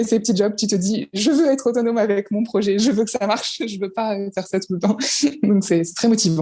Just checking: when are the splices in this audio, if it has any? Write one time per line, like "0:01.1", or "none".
none